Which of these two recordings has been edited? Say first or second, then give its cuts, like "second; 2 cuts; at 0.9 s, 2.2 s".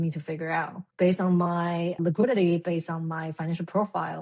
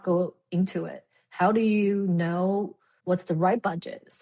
first; 1 cut; at 2.0 s